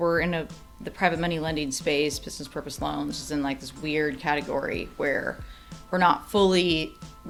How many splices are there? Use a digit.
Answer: 0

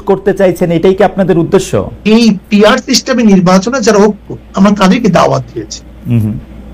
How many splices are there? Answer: 1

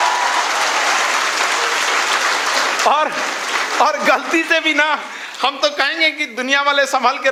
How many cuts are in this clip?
0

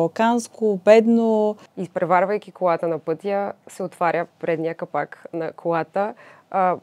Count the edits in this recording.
1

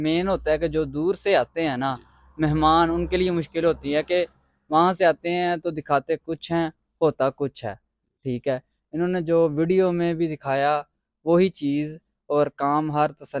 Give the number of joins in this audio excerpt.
0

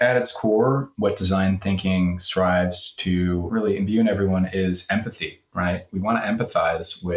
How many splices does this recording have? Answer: 2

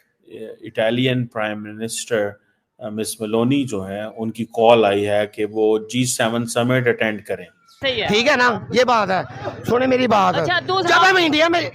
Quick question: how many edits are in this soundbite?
1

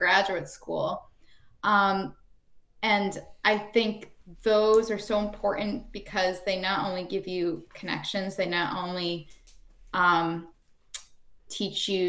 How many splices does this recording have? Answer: 0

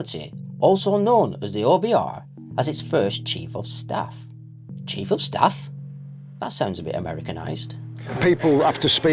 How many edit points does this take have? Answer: 1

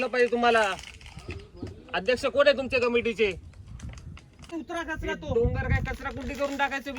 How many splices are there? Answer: 1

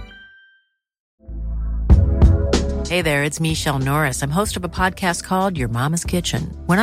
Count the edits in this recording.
1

